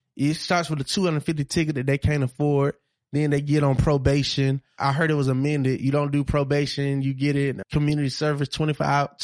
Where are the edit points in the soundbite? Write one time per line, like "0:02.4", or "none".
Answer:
0:04.9
0:07.6